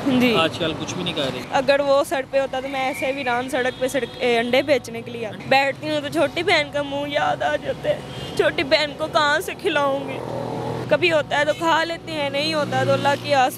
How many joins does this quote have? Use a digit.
3